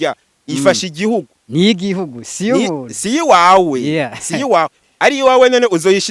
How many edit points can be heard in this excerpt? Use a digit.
2